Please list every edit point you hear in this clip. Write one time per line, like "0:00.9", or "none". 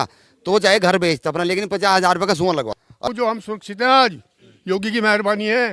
0:03.0

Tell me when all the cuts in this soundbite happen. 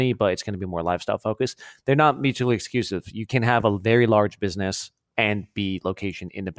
0:05.0

